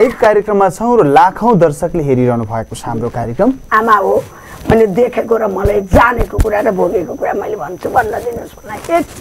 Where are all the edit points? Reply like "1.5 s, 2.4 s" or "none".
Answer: 3.6 s